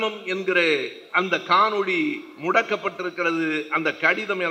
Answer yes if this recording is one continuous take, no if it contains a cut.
yes